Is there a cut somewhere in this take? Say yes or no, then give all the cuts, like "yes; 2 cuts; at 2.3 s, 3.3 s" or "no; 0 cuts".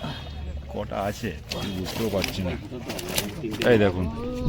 no; 0 cuts